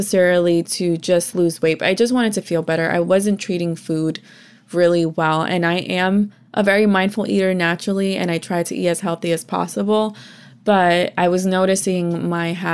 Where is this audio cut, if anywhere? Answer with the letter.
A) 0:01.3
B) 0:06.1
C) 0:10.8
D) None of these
A